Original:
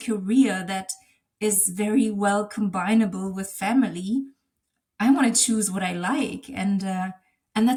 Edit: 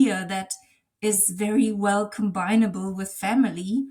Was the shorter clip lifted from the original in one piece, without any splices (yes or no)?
yes